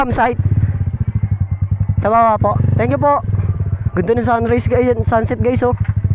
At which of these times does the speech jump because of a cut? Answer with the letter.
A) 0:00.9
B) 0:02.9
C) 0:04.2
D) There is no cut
D